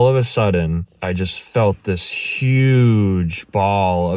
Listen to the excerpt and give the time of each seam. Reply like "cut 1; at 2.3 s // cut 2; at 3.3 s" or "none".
cut 1; at 0.9 s